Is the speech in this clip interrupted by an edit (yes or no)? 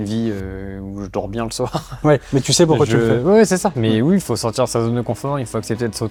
no